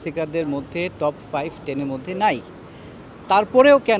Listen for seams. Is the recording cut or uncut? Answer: uncut